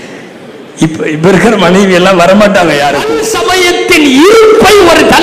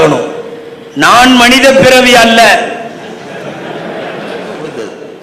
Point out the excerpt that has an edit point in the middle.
first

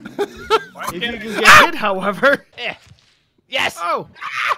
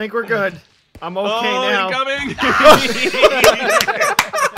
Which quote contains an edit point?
first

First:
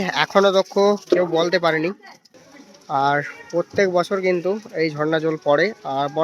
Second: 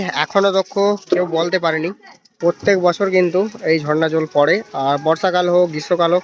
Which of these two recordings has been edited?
second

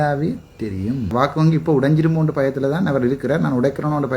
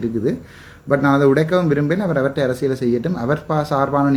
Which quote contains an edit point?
first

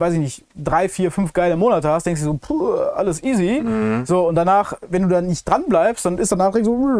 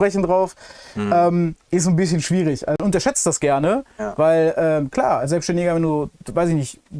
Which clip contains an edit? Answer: second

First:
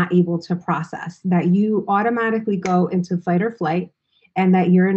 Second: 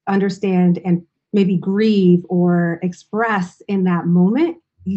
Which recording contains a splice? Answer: second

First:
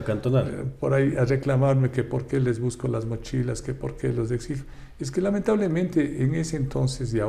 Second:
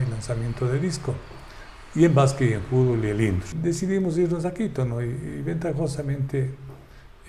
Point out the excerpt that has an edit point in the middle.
second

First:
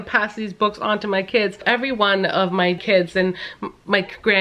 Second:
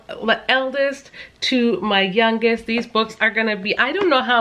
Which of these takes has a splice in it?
first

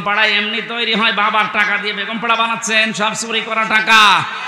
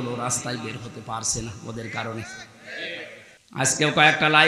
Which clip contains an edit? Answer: second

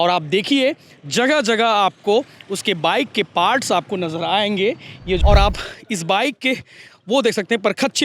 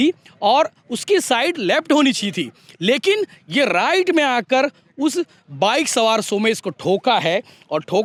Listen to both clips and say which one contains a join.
first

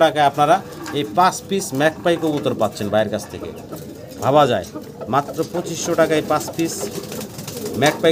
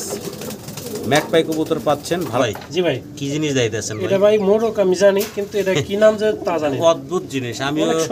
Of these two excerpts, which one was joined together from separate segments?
second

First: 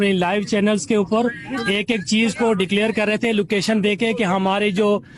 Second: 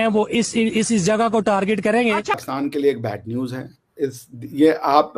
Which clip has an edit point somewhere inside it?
second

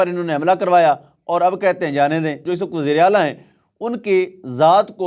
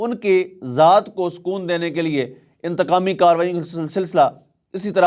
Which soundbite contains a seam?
first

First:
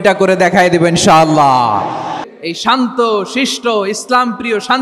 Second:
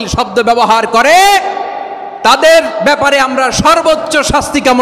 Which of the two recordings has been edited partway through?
first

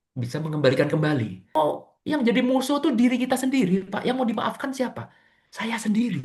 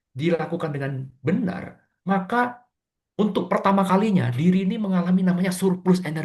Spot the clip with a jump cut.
first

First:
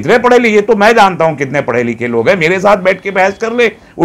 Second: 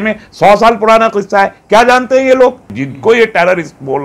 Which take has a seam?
second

